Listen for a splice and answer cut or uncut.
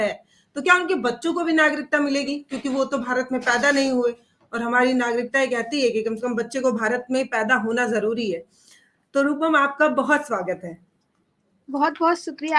uncut